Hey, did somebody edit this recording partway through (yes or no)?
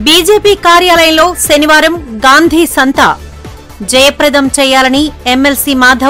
no